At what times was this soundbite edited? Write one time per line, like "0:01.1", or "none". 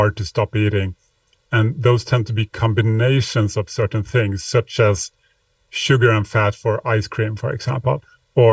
none